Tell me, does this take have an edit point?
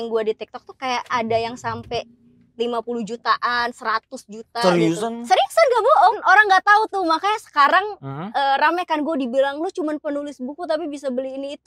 yes; 2 cuts; at 1.1 s, 6.2 s

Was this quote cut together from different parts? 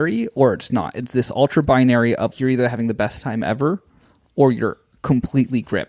yes; 1 cut; at 2.3 s

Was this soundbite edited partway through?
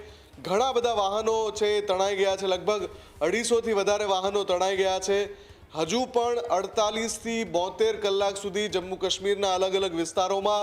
no; 0 cuts

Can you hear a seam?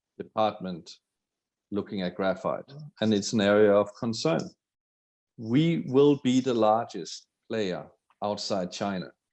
yes; 2 cuts; at 2.9 s, 5.3 s

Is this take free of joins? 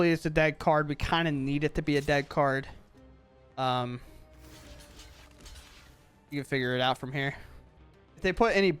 yes; 0 cuts

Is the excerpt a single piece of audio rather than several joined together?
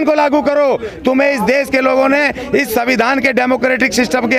yes; 0 cuts

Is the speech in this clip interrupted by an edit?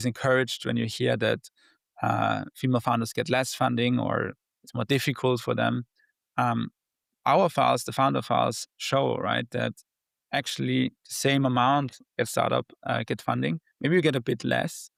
no; 0 cuts

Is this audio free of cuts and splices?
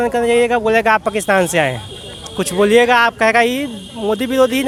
yes; 0 cuts

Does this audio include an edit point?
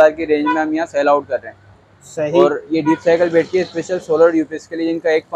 no; 0 cuts

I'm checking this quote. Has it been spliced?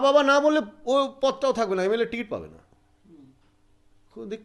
no; 0 cuts

